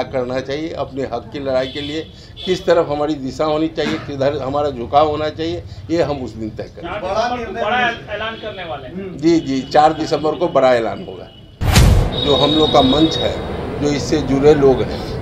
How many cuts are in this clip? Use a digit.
1